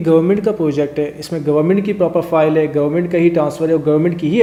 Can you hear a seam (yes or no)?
no